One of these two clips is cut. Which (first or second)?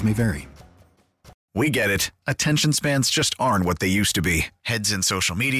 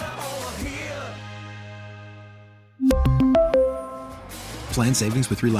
first